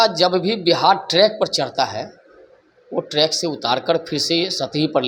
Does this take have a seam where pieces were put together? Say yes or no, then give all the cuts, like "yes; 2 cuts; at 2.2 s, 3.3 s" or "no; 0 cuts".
no; 0 cuts